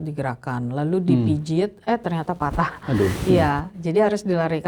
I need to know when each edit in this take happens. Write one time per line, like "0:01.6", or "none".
0:02.8

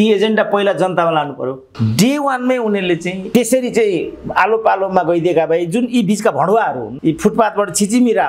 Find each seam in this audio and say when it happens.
0:01.7
0:03.2
0:06.9

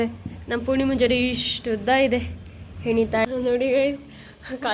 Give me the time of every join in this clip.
0:03.2

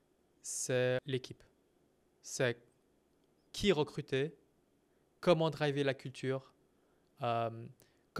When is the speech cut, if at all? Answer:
0:01.0
0:03.5

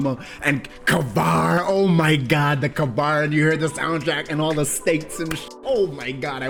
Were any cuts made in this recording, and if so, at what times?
none

